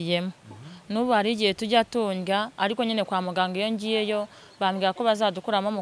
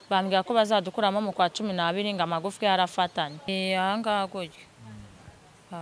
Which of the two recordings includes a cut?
second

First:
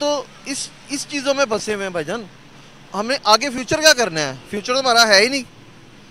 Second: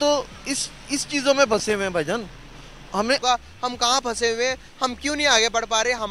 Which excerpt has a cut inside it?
second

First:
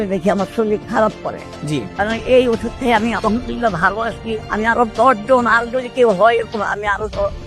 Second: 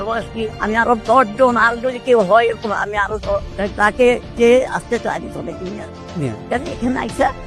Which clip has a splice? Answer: first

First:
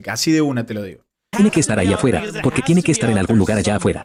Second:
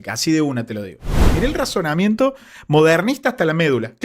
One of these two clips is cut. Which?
second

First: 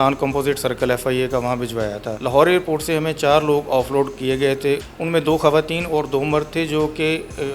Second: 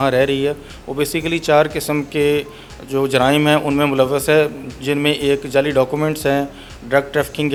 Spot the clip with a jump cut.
first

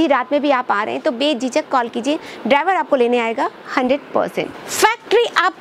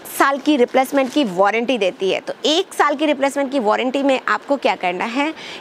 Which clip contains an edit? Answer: first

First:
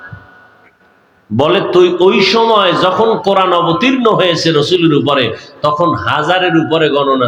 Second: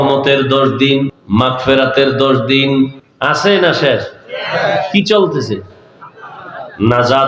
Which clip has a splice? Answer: second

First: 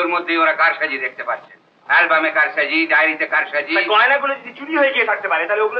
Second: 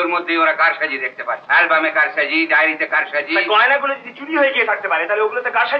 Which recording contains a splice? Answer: second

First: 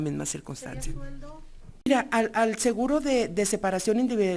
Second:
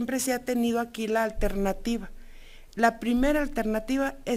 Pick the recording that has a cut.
first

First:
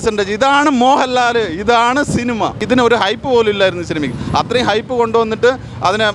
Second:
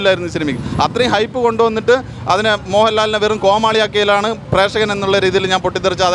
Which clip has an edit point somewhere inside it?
first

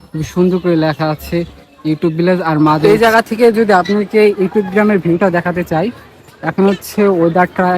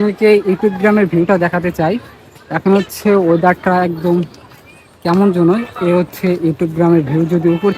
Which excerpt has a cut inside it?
first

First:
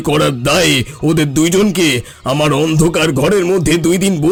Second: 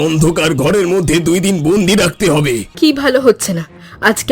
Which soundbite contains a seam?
second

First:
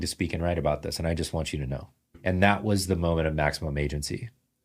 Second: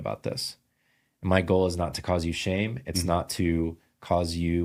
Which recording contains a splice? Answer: first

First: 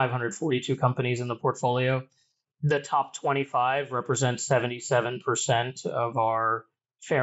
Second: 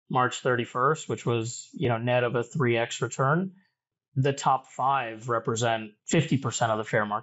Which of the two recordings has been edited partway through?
second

